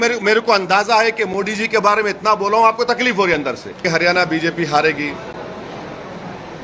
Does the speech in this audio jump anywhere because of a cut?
yes; 1 cut; at 3.8 s

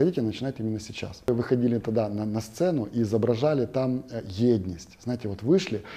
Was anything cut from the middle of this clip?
yes; 1 cut; at 1.3 s

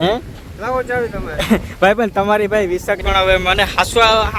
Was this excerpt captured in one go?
no; 1 cut; at 3.0 s

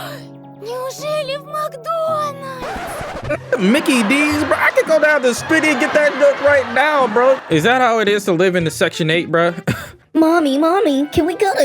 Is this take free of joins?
no; 1 cut; at 7.4 s

